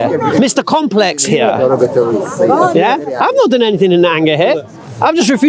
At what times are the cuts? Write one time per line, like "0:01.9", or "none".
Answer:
none